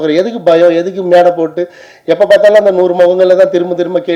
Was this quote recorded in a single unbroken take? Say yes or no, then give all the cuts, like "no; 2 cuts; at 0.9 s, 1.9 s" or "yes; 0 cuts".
yes; 0 cuts